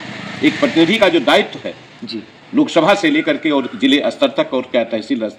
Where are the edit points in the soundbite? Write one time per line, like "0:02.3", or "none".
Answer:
none